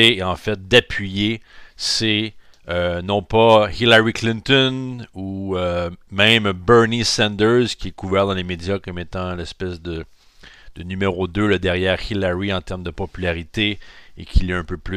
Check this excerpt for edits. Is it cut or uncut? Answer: cut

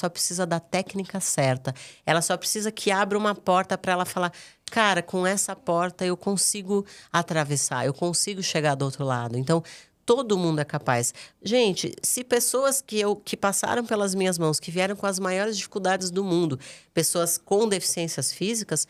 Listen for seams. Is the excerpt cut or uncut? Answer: uncut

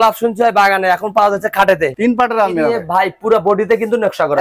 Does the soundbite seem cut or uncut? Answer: cut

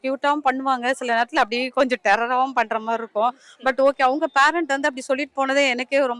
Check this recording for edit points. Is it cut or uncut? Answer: uncut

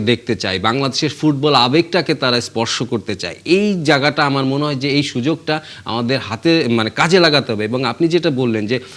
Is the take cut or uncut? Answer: uncut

